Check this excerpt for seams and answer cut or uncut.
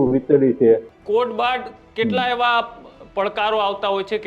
cut